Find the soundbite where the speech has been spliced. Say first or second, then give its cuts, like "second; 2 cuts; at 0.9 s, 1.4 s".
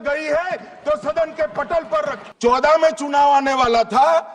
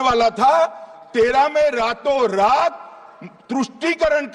first; 1 cut; at 2.2 s